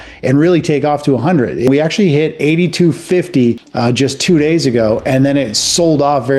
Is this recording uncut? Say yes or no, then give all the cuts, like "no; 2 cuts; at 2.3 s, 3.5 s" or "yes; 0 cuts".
no; 2 cuts; at 1.7 s, 3.7 s